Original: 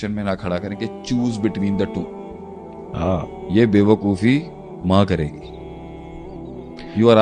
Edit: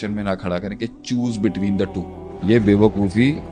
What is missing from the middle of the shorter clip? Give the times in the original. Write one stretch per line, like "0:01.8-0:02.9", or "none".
0:02.3-0:03.3